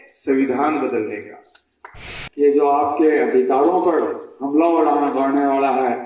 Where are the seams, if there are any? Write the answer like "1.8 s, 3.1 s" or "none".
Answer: 2.1 s